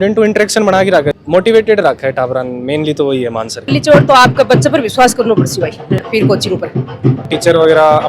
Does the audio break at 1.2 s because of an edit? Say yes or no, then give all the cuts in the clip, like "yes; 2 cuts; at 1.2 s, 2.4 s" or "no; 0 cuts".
yes; 3 cuts; at 1.2 s, 3.7 s, 7.3 s